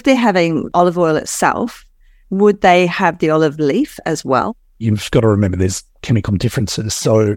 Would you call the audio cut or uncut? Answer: cut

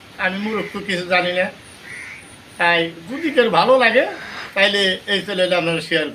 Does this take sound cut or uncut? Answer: uncut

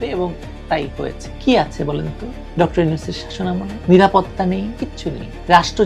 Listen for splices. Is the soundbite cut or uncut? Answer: cut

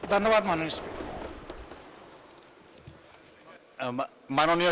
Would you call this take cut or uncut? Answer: uncut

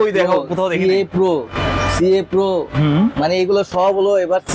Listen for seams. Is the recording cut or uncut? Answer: uncut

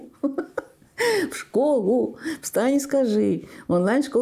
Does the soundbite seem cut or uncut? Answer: uncut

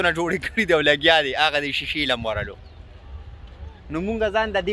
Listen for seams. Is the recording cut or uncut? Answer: uncut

